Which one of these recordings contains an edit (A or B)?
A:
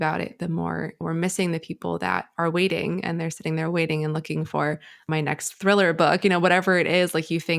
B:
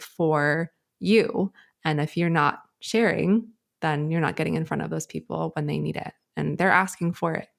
A